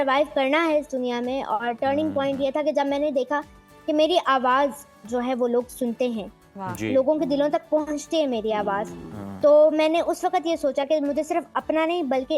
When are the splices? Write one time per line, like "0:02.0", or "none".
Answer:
none